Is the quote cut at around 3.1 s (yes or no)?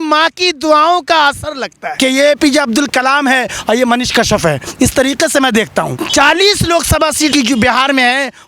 no